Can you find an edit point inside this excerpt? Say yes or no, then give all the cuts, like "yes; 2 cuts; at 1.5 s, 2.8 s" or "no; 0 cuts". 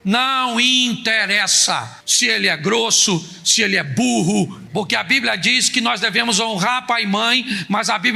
yes; 1 cut; at 4.6 s